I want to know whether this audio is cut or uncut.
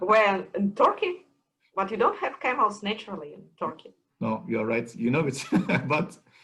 uncut